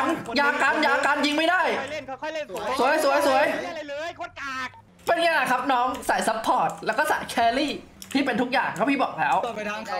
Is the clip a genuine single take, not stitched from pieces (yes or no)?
no